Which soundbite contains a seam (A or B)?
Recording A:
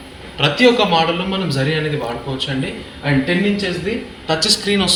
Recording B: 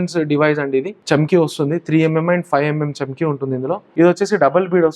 B